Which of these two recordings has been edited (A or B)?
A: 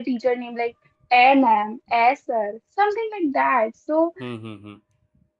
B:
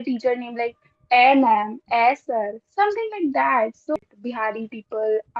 B